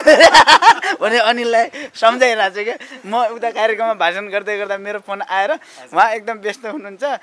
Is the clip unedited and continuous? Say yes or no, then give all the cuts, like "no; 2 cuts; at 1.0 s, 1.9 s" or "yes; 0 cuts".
yes; 0 cuts